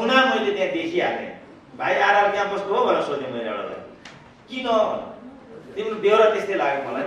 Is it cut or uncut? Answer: uncut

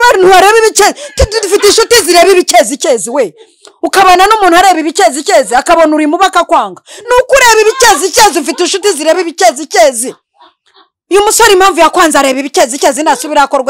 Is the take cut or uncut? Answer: uncut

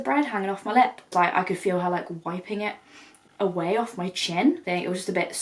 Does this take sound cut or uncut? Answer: cut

